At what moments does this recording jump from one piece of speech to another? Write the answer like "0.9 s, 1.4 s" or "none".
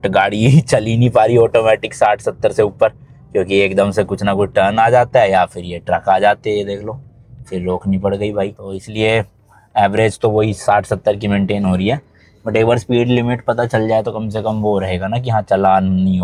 none